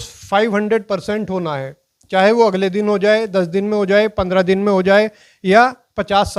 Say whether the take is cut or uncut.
uncut